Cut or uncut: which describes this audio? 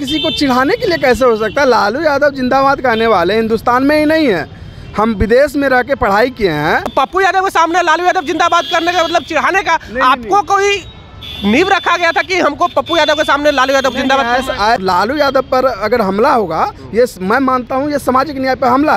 cut